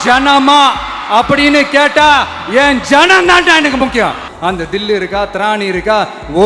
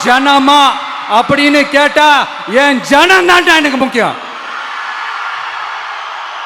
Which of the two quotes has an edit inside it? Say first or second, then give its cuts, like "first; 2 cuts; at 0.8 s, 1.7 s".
first; 1 cut; at 4.3 s